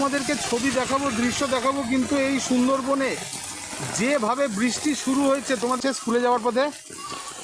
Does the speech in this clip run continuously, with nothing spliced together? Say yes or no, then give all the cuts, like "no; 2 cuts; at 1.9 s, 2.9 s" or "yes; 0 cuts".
no; 1 cut; at 5.8 s